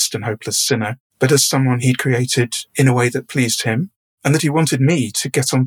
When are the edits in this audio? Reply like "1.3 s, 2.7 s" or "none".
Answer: 1.0 s, 2.6 s